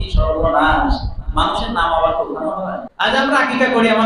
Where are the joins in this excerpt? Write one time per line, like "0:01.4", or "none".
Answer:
0:02.9